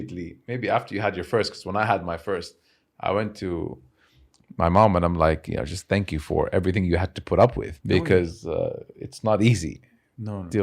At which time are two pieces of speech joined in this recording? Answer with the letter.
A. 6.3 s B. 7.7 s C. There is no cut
B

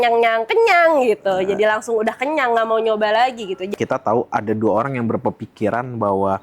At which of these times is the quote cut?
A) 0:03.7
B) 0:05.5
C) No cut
A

